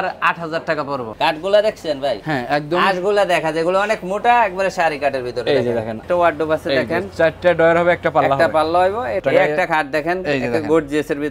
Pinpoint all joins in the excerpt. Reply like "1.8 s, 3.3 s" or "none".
1.1 s, 6.0 s, 9.2 s